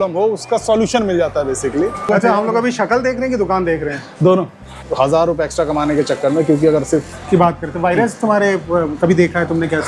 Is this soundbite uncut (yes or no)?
no